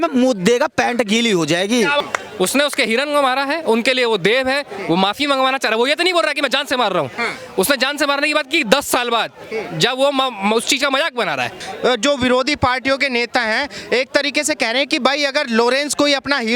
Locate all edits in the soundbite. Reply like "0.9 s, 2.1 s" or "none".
2.0 s, 11.6 s